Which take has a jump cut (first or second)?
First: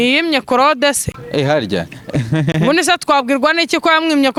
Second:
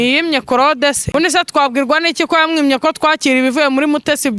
second